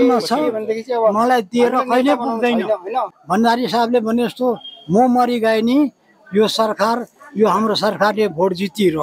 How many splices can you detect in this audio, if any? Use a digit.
1